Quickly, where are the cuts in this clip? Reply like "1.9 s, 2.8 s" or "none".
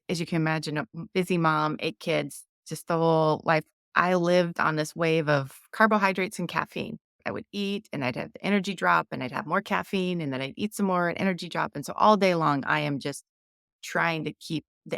1.0 s, 3.8 s, 7.1 s